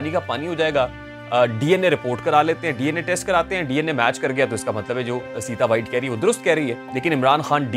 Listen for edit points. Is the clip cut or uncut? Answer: cut